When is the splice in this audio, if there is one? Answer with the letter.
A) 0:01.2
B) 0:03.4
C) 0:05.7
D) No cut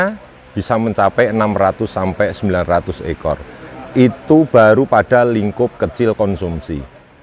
D